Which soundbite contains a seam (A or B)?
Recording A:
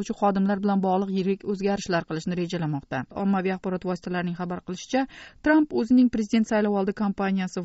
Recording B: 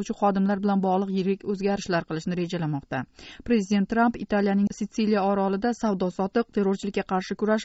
A